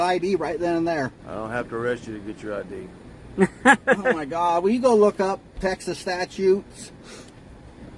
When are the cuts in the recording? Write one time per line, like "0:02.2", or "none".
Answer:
0:01.2